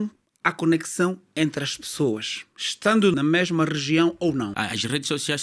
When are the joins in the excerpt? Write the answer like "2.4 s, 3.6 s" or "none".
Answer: 3.1 s, 4.5 s

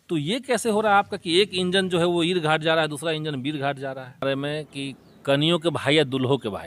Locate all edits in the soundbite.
4.2 s

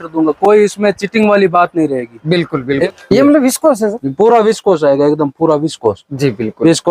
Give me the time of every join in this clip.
2.9 s

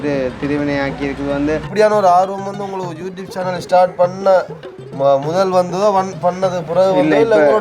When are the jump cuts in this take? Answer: 1.7 s

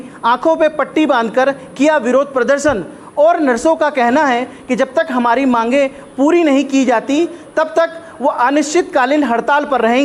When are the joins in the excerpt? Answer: none

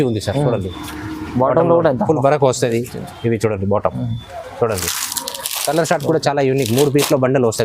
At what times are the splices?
none

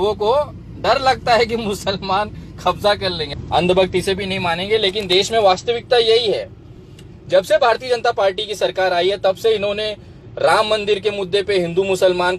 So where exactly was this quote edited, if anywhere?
none

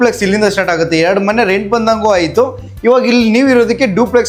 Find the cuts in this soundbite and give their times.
none

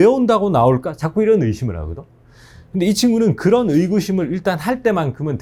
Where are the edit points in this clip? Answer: none

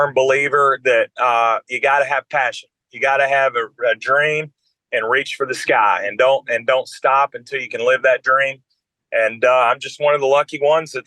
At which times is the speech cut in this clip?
none

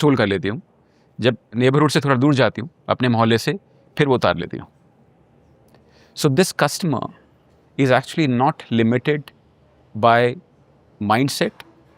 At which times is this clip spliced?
1.5 s

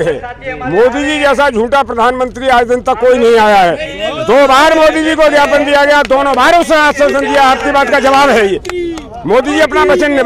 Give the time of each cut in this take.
none

